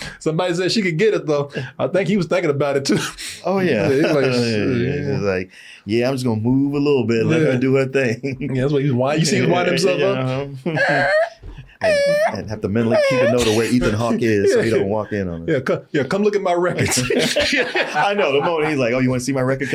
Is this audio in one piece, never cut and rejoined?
yes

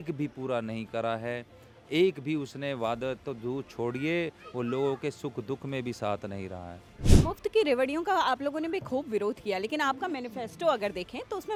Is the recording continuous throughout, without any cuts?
yes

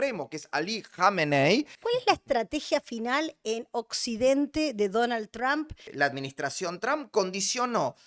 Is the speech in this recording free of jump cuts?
no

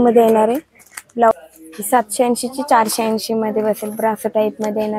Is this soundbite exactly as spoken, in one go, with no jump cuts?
no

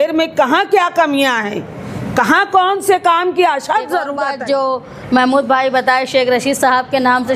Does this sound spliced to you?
yes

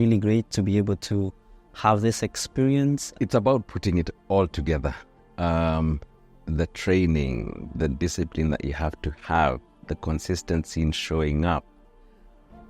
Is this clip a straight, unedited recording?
no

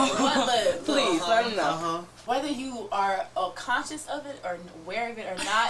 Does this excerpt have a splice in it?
yes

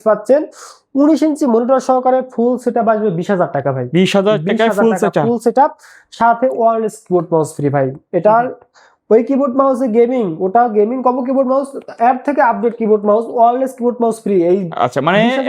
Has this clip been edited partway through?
no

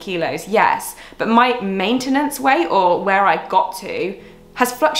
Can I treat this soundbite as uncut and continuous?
yes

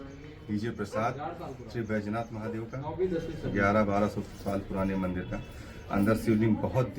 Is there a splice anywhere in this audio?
no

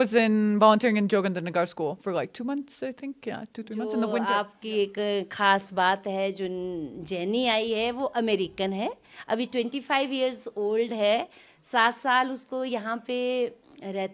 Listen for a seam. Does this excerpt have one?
yes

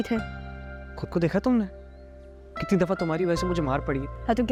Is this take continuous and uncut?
yes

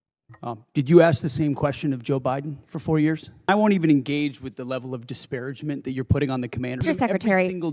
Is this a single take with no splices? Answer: no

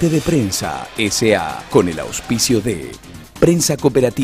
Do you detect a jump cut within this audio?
yes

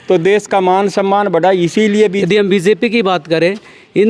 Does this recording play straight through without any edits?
no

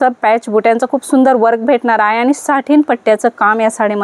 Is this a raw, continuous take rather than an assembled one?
yes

